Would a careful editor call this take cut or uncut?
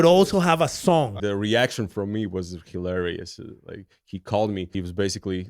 cut